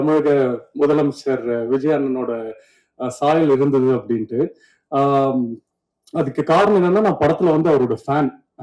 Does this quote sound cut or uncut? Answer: uncut